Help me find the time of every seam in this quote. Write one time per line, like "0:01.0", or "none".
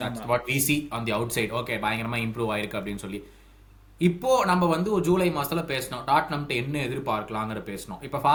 none